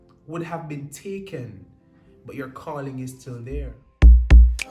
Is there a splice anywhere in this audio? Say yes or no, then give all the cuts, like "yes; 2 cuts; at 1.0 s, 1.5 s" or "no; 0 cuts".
yes; 1 cut; at 3.8 s